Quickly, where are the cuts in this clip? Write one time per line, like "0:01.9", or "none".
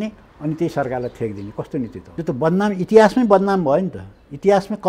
0:02.0

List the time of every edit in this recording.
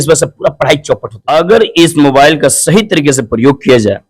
0:01.1

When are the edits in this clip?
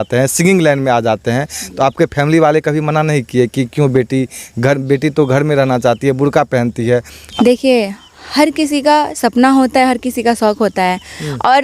0:07.2

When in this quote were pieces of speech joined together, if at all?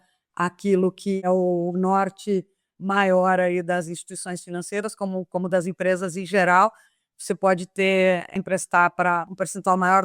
0:01.2

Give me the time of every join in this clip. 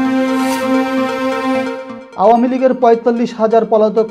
0:01.9

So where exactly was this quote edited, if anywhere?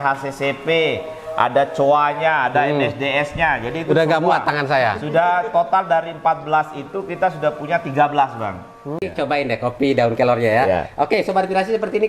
0:09.0

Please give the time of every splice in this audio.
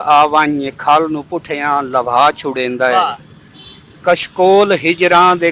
none

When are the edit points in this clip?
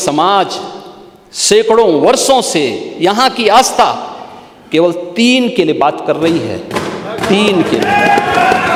none

